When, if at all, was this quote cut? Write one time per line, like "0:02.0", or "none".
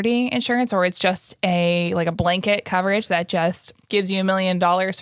none